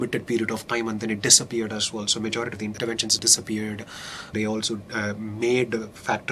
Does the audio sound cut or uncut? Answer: cut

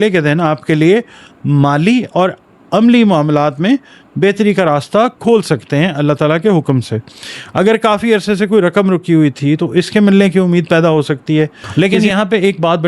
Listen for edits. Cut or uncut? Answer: cut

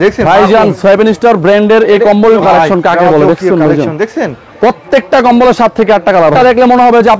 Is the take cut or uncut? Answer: cut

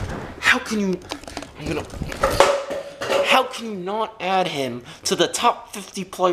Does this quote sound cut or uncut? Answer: uncut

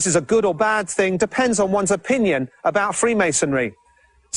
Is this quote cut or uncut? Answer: uncut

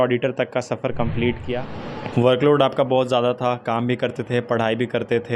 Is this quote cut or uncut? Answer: cut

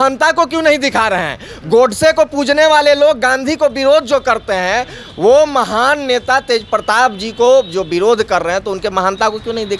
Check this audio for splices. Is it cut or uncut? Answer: uncut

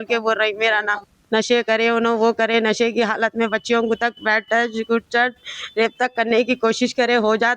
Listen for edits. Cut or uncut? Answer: cut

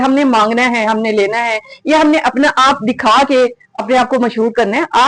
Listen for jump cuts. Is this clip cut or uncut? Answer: uncut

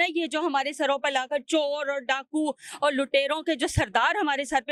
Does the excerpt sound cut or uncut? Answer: uncut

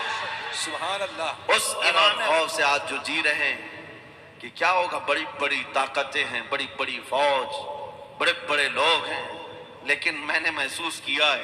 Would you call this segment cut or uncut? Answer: cut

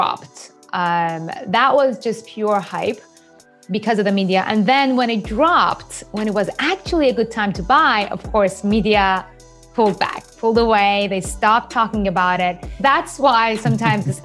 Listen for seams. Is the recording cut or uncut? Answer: cut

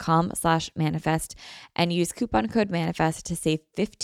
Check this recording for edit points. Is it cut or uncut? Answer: uncut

